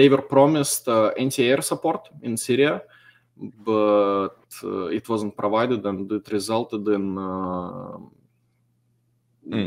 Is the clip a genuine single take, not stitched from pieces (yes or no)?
yes